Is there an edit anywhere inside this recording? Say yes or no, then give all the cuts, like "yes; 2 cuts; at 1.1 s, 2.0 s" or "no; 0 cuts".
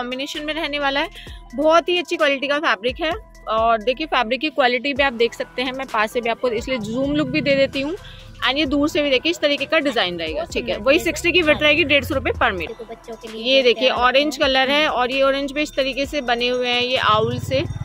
no; 0 cuts